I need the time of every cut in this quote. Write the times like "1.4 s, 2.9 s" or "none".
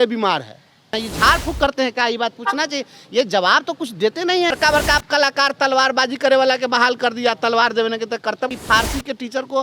0.9 s, 4.5 s, 8.5 s